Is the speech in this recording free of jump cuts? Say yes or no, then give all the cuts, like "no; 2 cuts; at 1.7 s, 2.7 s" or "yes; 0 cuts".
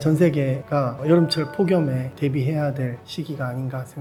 yes; 0 cuts